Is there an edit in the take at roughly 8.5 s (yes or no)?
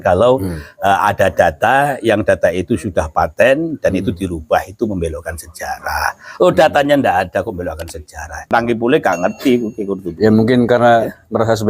yes